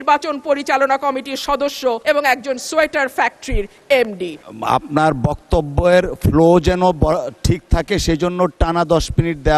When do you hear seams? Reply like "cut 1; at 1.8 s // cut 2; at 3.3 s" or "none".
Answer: cut 1; at 2.0 s // cut 2; at 4.5 s